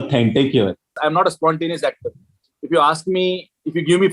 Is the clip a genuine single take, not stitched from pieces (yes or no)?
no